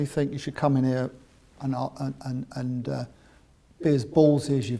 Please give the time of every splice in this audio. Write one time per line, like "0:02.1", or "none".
none